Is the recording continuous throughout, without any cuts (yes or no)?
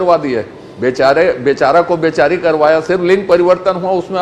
yes